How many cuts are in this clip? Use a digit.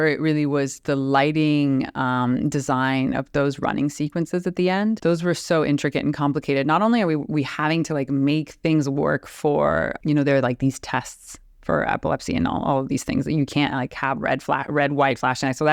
2